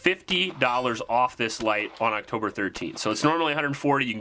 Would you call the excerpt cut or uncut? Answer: uncut